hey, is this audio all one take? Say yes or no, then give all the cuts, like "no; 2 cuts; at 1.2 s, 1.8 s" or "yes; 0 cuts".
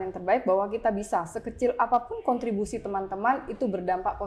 yes; 0 cuts